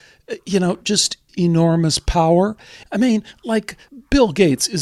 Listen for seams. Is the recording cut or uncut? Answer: cut